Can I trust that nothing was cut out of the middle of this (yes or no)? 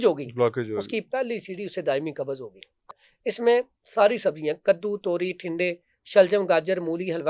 no